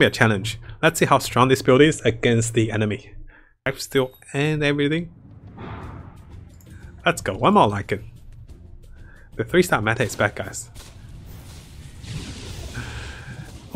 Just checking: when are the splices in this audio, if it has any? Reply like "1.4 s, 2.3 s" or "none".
3.7 s